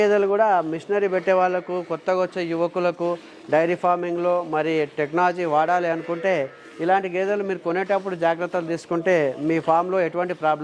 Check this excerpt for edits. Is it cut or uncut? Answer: uncut